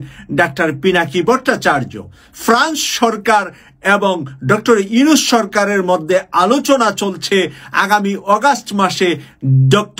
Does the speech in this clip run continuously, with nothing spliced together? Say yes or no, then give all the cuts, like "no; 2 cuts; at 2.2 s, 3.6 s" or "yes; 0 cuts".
yes; 0 cuts